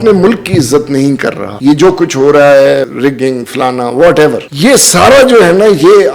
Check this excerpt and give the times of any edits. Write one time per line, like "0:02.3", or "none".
0:01.5
0:02.9
0:04.5